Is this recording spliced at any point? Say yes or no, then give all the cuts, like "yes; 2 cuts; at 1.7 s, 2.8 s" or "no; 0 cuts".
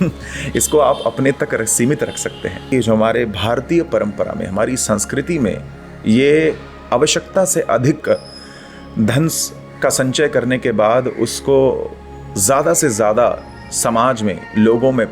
yes; 1 cut; at 2.6 s